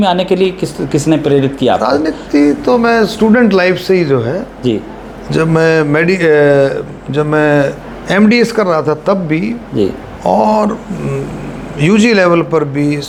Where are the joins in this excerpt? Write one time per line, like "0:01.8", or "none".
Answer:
none